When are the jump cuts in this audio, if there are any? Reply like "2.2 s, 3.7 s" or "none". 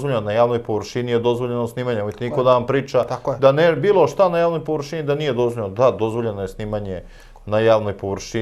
none